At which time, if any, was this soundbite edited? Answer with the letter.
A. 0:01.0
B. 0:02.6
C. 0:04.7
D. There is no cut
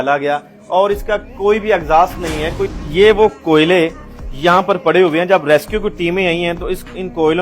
B